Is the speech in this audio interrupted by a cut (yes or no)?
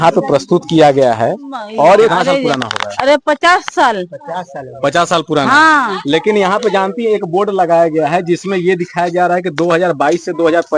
yes